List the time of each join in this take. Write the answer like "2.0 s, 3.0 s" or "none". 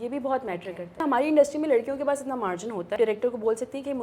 1.0 s, 2.9 s